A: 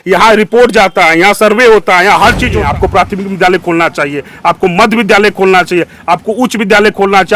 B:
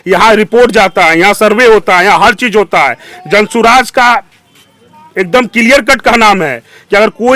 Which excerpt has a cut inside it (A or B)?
A